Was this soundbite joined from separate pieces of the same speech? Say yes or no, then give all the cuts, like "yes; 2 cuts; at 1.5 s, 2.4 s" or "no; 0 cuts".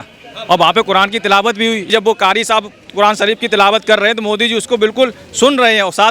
yes; 1 cut; at 1.9 s